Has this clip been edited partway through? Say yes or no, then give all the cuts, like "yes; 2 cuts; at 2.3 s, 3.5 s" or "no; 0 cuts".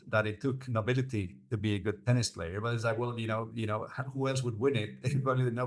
no; 0 cuts